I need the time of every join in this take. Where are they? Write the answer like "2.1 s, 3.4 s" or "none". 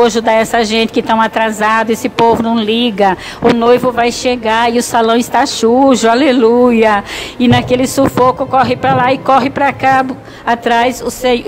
none